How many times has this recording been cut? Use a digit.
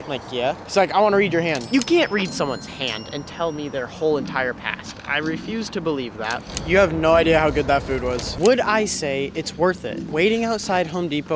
3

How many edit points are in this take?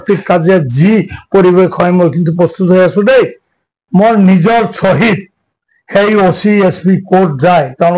1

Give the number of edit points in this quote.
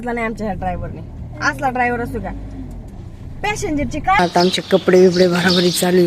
1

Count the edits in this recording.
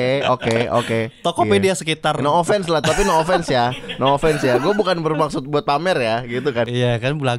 0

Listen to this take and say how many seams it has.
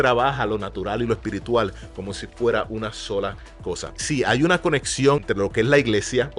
0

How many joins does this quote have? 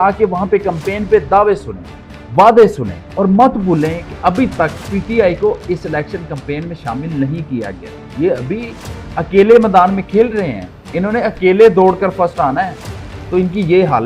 0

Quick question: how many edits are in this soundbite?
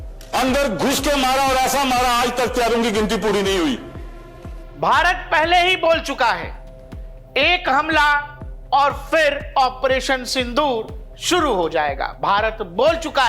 0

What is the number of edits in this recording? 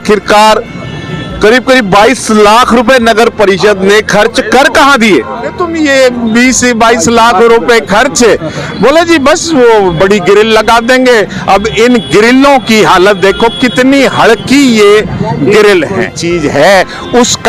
2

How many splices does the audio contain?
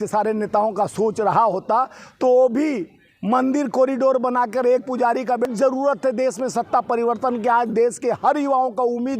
1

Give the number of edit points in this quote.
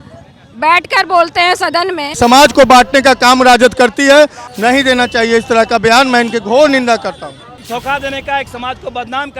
3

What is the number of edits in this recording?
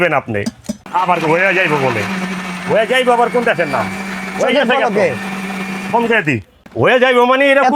2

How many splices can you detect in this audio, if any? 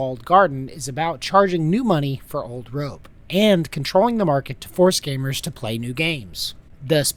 0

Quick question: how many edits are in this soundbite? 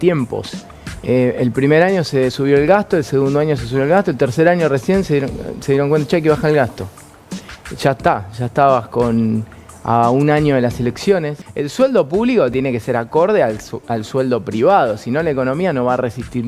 1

